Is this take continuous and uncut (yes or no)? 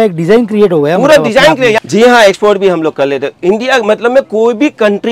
no